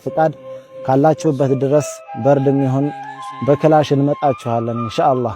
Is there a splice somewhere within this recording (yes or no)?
no